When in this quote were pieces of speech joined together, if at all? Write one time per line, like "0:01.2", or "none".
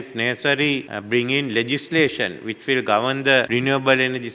0:00.9
0:03.5